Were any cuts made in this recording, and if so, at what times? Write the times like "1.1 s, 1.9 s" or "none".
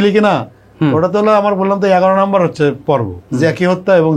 3.1 s